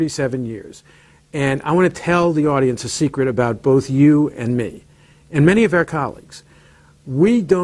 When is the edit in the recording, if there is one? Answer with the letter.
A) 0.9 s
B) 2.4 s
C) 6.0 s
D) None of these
C